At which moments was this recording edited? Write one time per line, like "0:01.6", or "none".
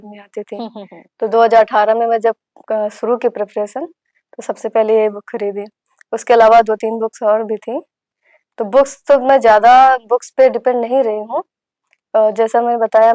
none